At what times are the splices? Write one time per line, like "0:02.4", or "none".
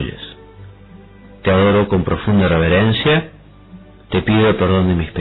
0:01.7